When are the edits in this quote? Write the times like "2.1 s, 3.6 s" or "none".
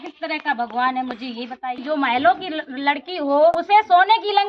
1.8 s, 3.5 s